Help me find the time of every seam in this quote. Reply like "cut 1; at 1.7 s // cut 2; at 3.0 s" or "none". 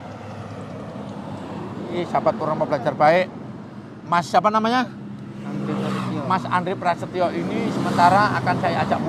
cut 1; at 2.0 s